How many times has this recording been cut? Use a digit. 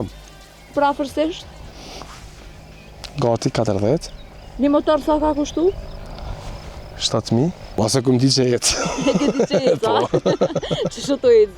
0